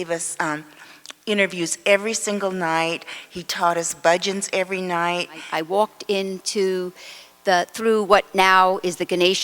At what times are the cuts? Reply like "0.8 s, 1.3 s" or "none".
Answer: 5.5 s